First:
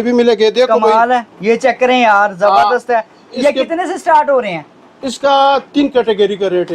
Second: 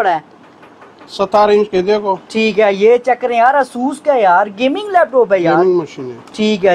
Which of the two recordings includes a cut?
first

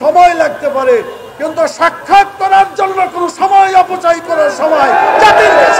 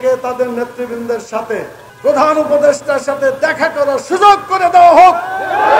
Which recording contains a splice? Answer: second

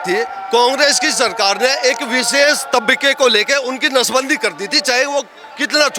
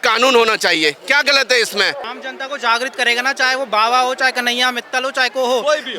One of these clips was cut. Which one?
second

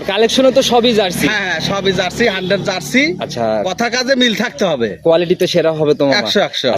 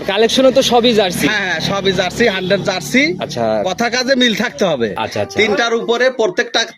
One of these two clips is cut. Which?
second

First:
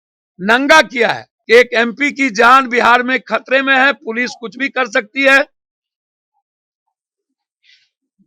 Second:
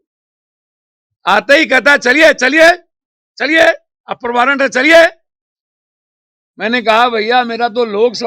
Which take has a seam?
first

